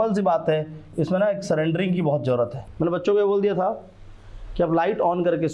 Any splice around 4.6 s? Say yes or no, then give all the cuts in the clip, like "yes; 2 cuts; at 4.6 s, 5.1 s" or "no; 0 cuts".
no; 1 cut; at 2.6 s